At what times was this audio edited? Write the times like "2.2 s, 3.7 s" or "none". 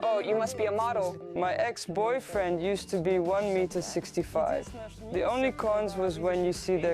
1.2 s